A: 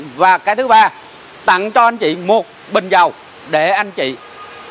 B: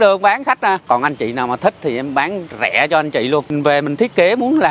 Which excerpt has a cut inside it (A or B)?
B